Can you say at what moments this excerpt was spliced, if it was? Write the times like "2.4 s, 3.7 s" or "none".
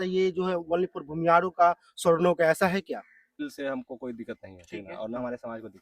3.5 s